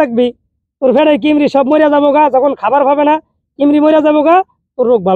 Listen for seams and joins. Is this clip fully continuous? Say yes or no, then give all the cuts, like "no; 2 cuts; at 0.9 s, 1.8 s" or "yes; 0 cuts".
yes; 0 cuts